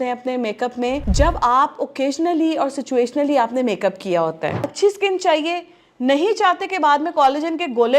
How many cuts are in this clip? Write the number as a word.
two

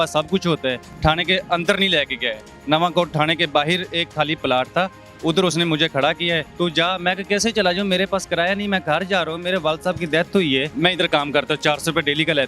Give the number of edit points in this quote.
three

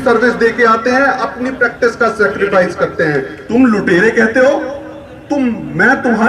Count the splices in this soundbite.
one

